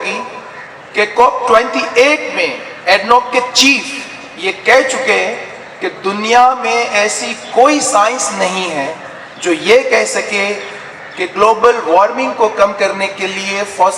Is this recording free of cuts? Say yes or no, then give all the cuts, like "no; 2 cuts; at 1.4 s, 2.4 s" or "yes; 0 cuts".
yes; 0 cuts